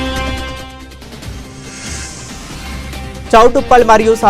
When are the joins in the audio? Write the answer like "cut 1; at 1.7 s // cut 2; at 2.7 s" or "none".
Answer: cut 1; at 1.8 s